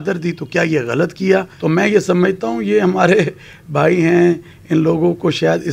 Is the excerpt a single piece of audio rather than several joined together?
no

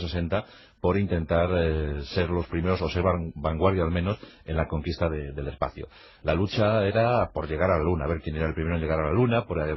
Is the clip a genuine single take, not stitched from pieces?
yes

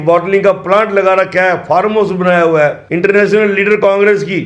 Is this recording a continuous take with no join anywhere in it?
no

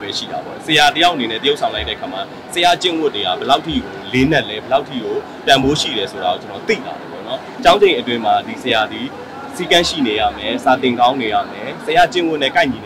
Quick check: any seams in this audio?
yes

